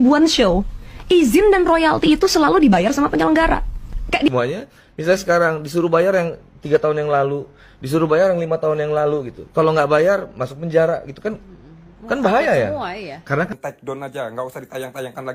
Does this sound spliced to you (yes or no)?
yes